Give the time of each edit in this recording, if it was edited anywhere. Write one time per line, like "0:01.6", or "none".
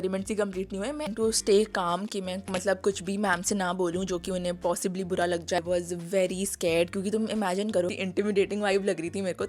0:01.1
0:05.6
0:07.9